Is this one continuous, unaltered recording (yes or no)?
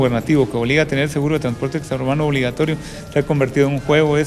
yes